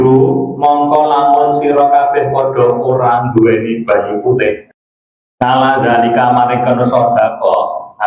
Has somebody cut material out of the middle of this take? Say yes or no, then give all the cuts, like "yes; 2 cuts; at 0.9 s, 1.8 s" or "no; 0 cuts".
no; 0 cuts